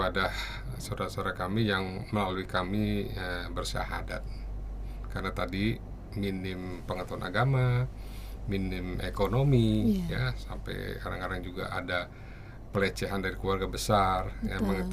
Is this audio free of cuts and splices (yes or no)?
yes